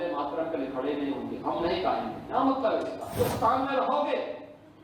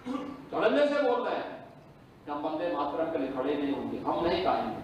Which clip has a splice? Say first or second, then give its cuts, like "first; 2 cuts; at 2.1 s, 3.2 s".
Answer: first; 1 cut; at 3.1 s